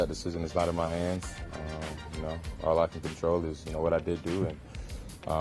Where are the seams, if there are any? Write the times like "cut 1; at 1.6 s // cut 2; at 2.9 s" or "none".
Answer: none